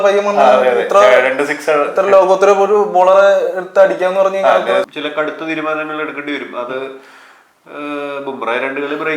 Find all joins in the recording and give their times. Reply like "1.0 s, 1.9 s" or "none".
4.9 s